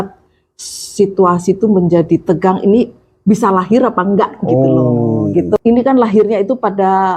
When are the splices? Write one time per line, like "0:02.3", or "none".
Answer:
0:05.6